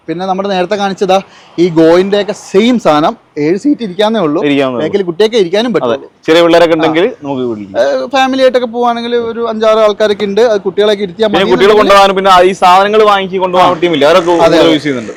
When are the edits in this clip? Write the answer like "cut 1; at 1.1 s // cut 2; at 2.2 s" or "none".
none